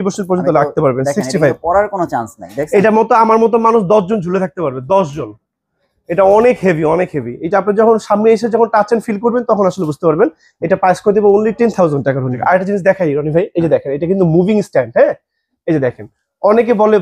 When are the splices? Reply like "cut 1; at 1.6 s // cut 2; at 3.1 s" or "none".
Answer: cut 1; at 12.3 s